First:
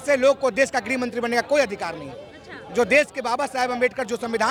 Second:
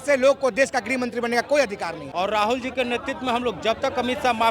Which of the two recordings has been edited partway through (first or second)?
second